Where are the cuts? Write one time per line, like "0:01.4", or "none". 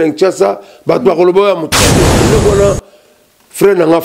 0:02.2